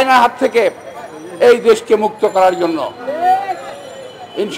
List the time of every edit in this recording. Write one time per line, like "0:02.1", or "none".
none